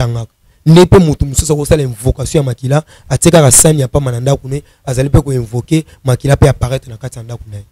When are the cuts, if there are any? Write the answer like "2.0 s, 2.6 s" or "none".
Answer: none